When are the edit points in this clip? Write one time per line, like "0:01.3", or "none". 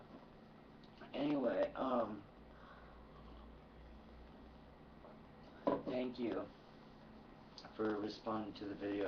0:07.5